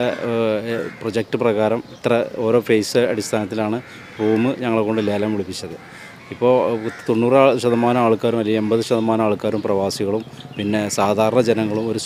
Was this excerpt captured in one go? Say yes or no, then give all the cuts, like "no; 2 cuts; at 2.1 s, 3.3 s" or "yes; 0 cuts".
yes; 0 cuts